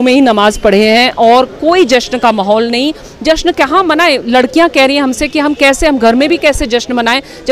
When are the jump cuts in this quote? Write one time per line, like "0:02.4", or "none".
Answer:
none